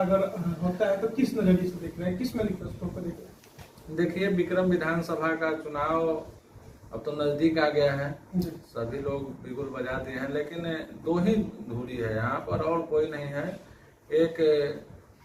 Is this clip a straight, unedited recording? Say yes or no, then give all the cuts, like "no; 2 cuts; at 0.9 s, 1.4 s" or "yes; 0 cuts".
yes; 0 cuts